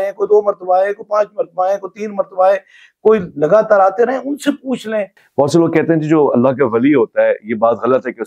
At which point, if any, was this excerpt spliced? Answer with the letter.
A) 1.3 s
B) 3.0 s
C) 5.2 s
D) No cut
C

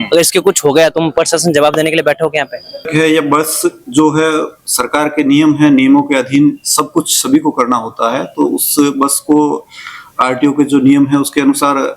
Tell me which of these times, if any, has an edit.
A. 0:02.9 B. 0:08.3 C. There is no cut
A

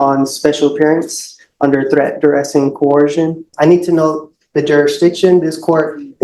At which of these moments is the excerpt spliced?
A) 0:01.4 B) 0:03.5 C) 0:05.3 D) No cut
B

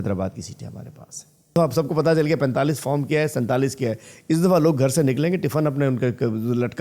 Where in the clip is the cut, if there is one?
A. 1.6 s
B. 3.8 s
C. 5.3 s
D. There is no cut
A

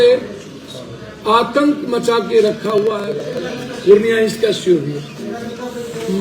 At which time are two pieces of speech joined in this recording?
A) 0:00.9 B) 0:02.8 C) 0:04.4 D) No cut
B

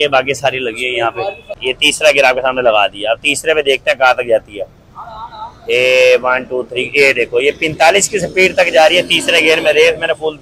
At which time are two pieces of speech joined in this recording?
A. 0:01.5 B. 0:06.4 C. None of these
A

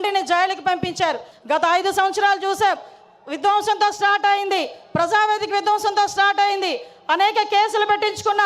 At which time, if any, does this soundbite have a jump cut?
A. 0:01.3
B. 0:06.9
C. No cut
A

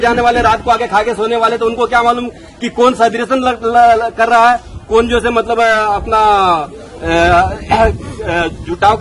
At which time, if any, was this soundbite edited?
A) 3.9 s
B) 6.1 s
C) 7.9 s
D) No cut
D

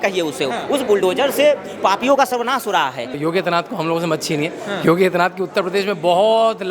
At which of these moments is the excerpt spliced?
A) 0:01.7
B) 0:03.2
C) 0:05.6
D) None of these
B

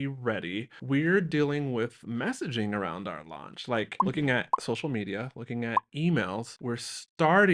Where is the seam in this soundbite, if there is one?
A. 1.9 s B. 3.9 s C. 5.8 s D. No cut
B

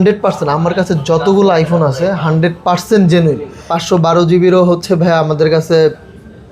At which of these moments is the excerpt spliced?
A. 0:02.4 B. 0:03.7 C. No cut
B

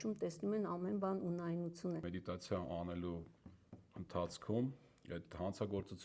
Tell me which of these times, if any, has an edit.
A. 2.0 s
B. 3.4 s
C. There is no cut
A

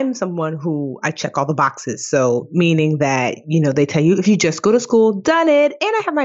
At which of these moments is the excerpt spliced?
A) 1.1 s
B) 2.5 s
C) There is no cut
C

